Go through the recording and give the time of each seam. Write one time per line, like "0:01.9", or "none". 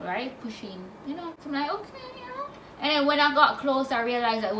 0:01.3